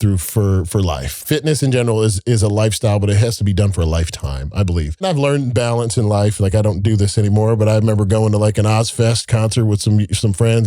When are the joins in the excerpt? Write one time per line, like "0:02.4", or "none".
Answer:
0:01.2
0:05.0

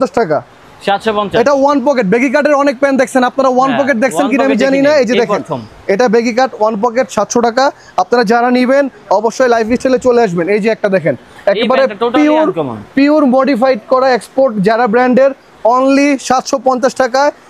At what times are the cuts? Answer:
none

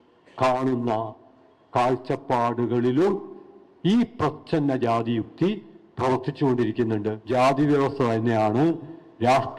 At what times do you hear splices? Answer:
0:07.2

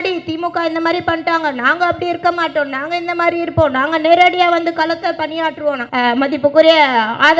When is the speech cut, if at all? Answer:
0:05.8

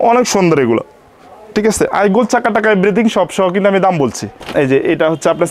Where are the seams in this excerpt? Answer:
0:04.4

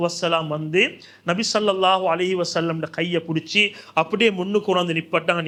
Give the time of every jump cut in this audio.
none

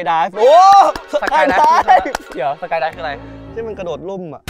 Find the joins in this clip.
0:02.3

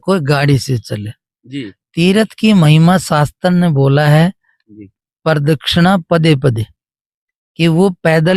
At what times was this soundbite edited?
none

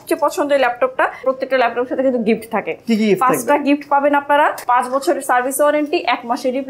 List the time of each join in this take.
0:01.2
0:04.6

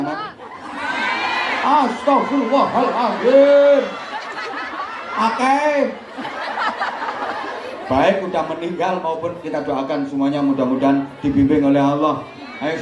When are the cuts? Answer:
none

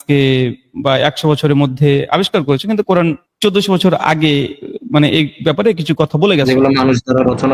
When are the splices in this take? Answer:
none

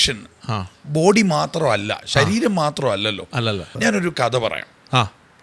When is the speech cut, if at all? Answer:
0:03.7

